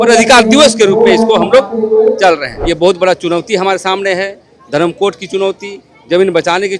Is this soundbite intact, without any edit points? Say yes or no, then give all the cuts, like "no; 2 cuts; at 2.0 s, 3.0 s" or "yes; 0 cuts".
no; 1 cut; at 2.5 s